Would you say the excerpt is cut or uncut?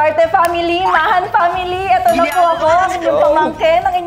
uncut